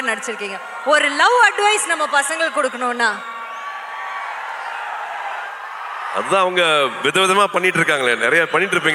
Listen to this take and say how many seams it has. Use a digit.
0